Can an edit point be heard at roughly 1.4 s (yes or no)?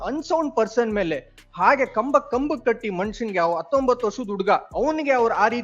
no